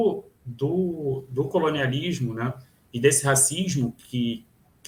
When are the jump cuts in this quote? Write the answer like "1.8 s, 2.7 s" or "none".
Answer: none